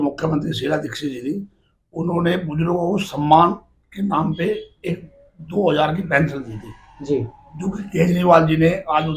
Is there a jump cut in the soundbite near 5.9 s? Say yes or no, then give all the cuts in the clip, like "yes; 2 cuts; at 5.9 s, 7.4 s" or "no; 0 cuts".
no; 0 cuts